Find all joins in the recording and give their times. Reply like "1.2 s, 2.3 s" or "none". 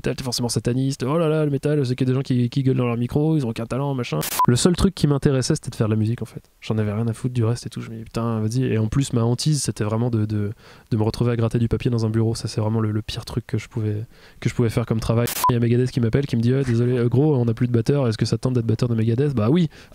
4.2 s, 15.5 s